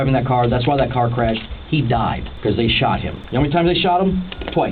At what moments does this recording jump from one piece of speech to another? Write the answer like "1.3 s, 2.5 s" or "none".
2.3 s, 3.2 s